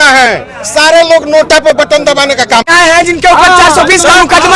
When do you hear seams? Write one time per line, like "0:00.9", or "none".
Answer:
0:02.7